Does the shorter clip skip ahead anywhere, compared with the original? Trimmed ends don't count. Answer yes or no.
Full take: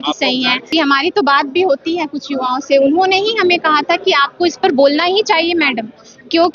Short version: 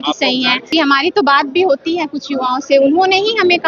no